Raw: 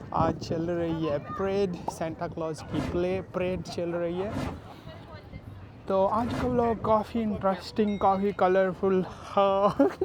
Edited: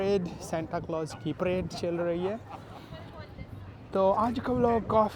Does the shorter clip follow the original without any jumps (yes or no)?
no